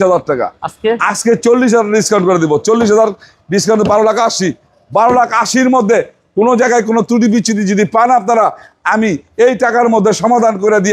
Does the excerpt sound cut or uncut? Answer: uncut